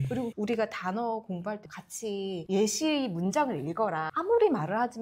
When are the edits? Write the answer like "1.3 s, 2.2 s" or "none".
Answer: 1.6 s